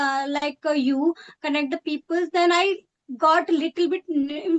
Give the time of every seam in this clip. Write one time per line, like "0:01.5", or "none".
none